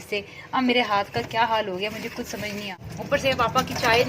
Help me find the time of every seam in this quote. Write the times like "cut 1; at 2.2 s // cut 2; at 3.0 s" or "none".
cut 1; at 2.8 s